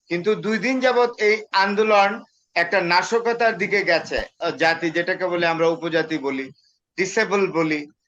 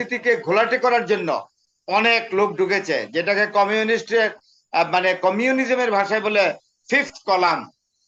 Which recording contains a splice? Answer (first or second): first